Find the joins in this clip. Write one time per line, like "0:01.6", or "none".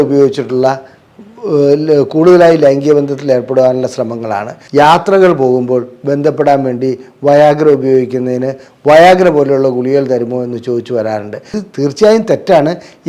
0:04.5
0:11.6